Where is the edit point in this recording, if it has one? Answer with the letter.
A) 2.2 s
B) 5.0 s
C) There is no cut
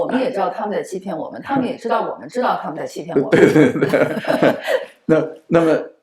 C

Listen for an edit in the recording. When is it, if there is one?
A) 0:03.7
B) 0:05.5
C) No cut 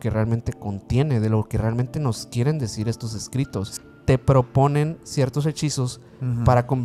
A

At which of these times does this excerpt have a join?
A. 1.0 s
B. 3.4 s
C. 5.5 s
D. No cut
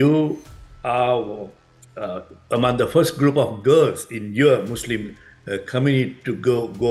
D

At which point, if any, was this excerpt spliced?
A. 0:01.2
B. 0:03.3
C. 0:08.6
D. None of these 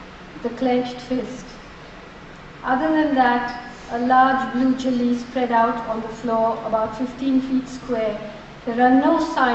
D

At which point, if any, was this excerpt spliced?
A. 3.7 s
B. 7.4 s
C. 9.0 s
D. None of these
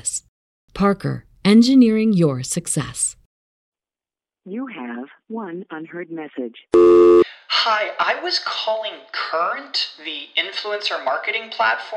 A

